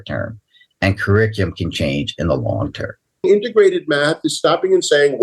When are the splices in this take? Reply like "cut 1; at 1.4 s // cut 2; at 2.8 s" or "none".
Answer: cut 1; at 3.2 s